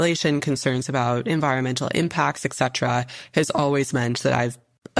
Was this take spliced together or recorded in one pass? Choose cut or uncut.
uncut